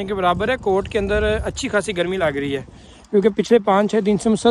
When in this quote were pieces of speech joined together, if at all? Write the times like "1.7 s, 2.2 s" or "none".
none

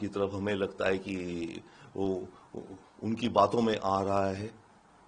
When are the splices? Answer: none

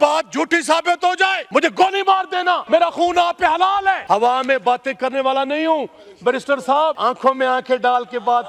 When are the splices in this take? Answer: 1.4 s, 2.6 s, 4.0 s, 7.0 s

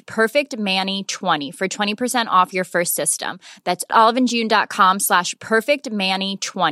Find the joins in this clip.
1.4 s

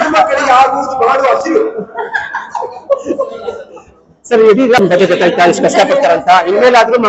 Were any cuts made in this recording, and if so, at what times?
4.8 s

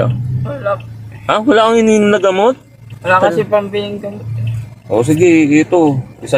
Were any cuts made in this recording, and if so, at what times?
none

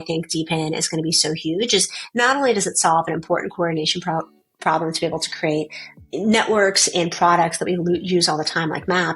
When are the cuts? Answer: 5.8 s

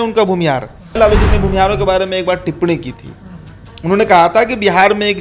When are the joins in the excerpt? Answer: 1.0 s

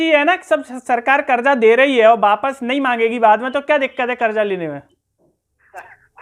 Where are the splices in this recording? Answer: none

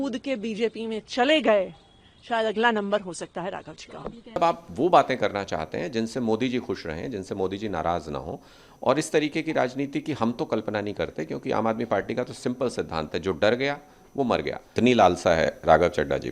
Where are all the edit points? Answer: 4.4 s, 14.7 s

